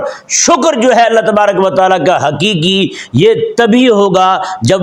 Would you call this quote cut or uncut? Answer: uncut